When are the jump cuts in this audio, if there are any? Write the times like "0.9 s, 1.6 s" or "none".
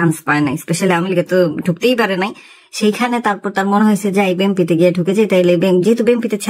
none